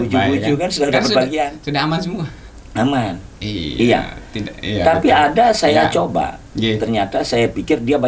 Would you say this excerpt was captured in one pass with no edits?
yes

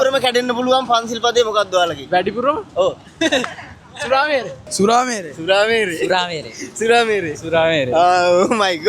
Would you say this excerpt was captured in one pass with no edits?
no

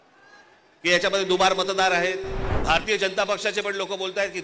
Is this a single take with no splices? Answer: no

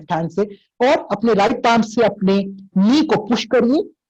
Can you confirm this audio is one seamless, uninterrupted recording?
yes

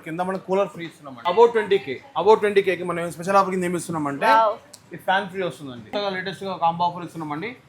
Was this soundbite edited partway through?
yes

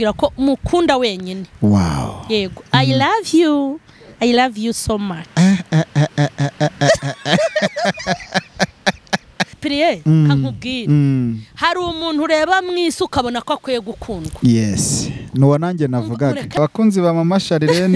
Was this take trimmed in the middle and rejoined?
yes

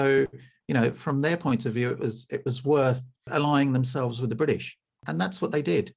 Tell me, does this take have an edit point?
yes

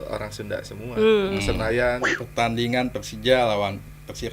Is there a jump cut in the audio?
yes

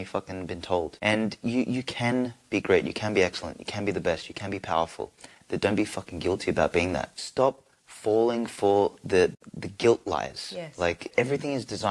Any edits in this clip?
yes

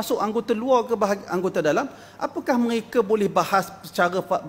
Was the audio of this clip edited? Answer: no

